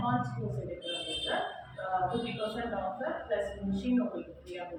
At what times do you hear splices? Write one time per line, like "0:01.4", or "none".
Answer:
none